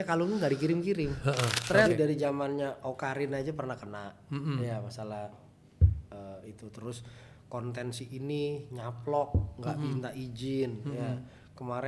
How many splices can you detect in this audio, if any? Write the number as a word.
one